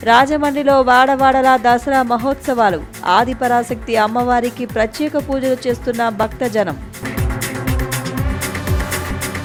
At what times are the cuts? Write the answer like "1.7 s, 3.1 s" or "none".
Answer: none